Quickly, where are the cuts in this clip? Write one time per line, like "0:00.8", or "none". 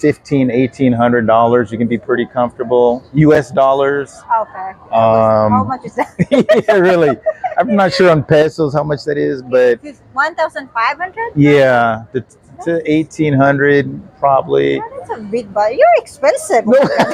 none